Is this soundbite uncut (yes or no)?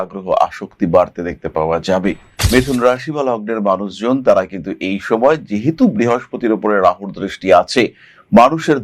no